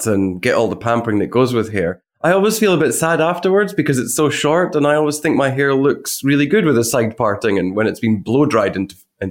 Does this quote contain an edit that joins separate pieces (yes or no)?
yes